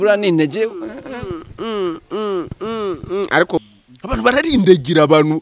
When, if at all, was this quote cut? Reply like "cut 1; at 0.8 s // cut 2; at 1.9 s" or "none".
cut 1; at 3.6 s